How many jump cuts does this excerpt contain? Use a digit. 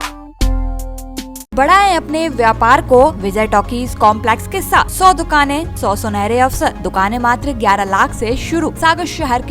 6